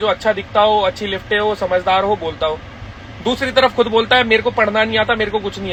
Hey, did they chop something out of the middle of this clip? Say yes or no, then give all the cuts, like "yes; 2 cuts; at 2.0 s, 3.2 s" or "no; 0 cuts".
no; 0 cuts